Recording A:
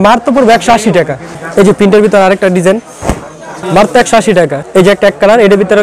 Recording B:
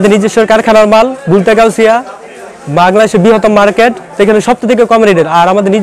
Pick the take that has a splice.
A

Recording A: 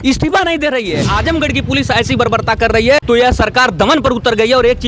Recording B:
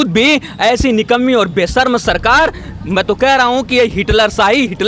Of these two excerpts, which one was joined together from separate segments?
A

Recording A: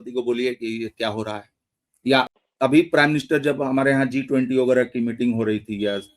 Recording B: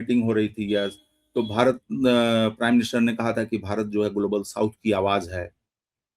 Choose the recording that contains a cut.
A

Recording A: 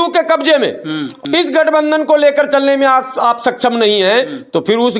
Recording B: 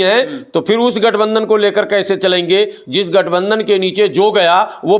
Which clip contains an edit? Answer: A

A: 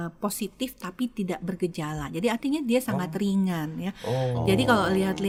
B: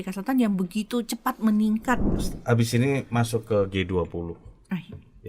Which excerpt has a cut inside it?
B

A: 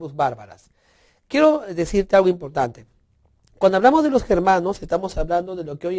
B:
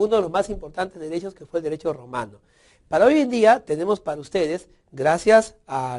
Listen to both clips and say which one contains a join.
B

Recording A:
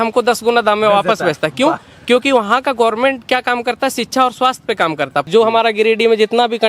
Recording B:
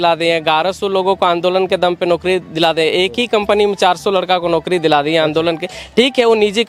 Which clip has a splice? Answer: A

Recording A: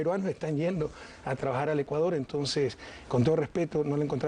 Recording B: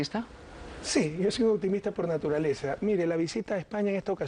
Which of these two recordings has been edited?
B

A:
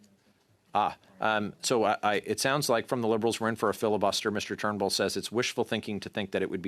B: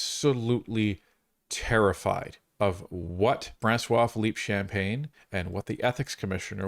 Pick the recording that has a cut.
B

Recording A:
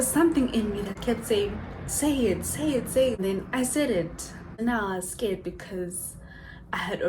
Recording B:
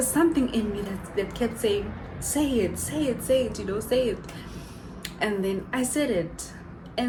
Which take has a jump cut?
A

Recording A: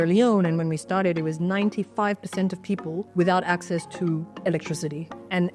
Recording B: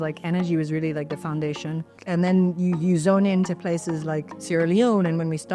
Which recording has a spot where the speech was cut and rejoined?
B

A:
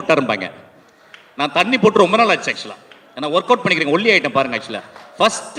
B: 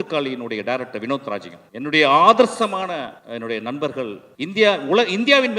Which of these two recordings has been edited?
B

